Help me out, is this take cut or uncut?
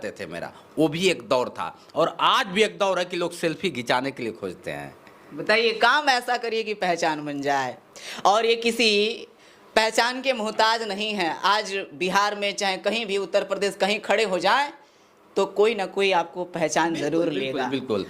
uncut